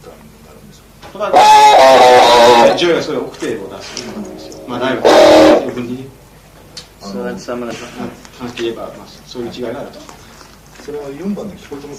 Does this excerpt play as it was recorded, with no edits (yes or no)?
yes